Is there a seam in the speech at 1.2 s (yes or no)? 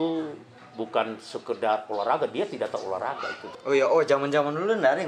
no